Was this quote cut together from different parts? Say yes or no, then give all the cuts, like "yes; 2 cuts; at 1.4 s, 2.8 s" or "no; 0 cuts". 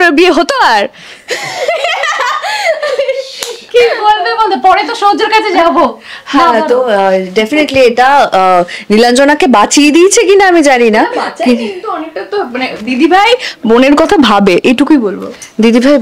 no; 0 cuts